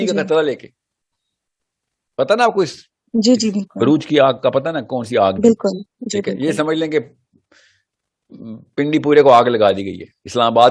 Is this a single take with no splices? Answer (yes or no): yes